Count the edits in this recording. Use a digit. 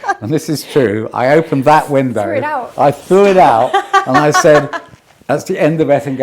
0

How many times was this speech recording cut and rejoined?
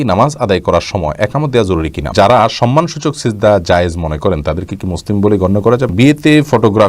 2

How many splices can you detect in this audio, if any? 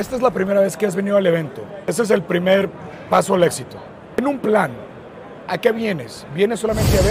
2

